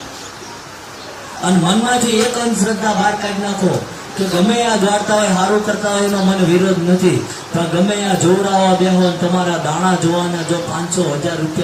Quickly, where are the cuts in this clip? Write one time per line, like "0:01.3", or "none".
none